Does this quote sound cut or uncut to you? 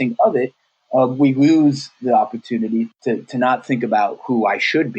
cut